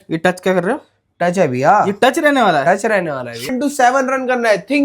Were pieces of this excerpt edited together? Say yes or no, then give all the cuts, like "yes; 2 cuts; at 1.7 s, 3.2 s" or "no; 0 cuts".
yes; 1 cut; at 3.5 s